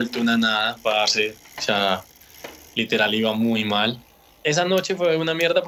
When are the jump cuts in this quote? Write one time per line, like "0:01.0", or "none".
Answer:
0:04.1